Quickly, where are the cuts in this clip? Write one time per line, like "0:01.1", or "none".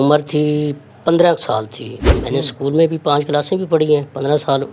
none